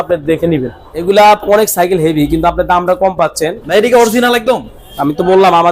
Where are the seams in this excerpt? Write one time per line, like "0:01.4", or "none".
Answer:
0:00.9
0:03.6

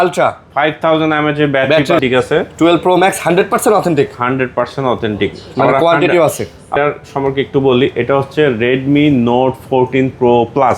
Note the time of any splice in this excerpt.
0:02.0
0:06.7

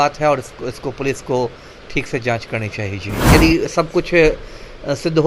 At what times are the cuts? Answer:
0:03.3

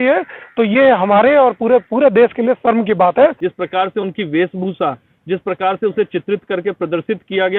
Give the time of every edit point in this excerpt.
0:03.4

